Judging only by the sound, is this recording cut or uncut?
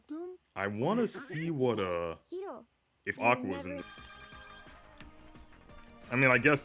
cut